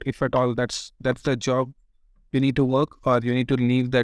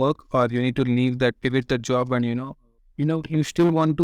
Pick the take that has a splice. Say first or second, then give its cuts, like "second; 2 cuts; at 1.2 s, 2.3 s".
second; 1 cut; at 2.8 s